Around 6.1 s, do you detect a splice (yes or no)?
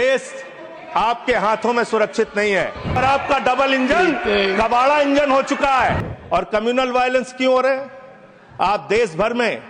yes